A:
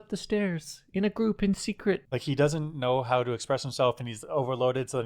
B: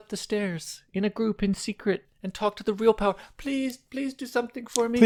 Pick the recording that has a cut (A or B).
A